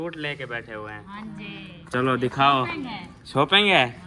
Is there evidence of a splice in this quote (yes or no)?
no